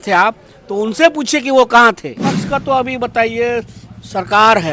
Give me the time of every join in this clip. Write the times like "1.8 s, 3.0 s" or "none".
2.3 s